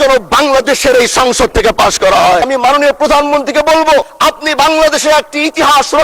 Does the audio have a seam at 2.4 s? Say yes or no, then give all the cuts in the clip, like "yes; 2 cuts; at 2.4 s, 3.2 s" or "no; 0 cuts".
yes; 2 cuts; at 2.4 s, 4.1 s